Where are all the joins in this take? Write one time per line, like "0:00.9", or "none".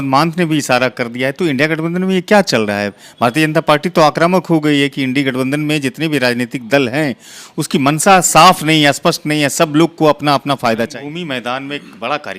0:11.0